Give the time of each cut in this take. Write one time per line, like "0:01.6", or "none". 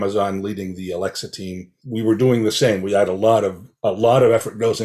0:01.7